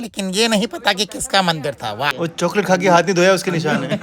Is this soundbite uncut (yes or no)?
no